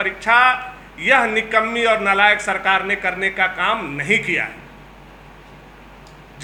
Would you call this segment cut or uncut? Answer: uncut